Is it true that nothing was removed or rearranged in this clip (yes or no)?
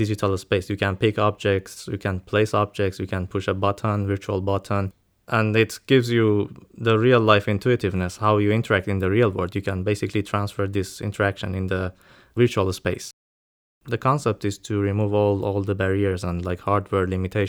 no